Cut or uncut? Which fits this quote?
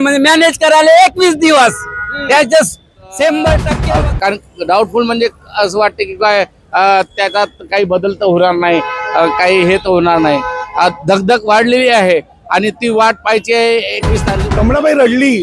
cut